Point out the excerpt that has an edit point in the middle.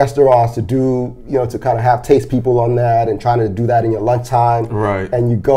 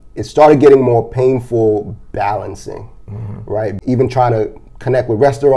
second; 1 cut; at 3.8 s

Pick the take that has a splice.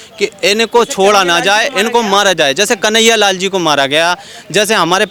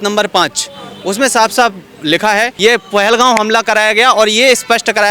second; 1 cut; at 2.5 s

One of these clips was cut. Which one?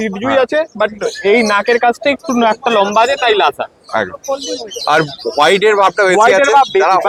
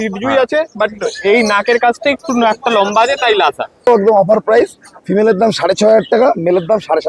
second; 1 cut; at 3.9 s

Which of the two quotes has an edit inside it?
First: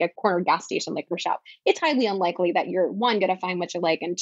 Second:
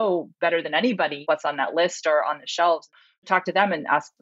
second; 2 cuts; at 1.2 s, 3.1 s

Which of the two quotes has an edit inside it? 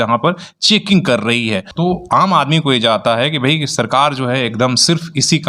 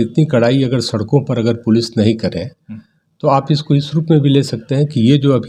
first; 1 cut; at 1.7 s

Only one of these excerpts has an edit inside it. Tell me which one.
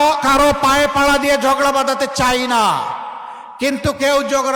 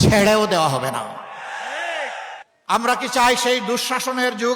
second; 1 cut; at 2.5 s

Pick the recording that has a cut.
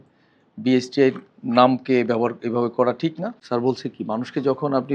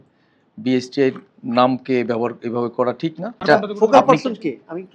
first; 1 cut; at 3.3 s

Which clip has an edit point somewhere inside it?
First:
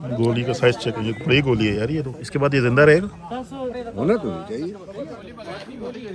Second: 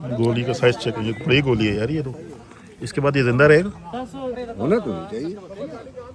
first; 2 cuts; at 2.2 s, 5.2 s

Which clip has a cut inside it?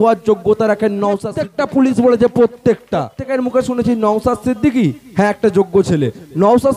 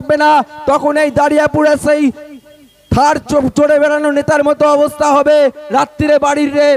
first; 2 cuts; at 1.4 s, 3.2 s

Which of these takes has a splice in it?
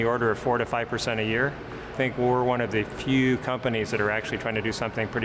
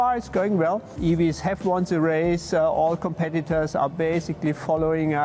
second; 1 cut; at 0.9 s

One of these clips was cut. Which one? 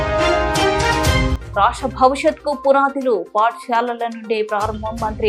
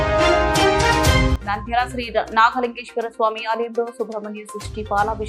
second; 1 cut; at 1.3 s

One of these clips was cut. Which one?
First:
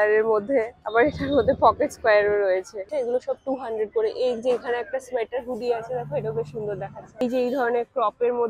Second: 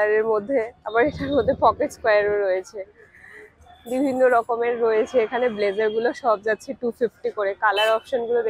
first; 2 cuts; at 2.8 s, 7.2 s

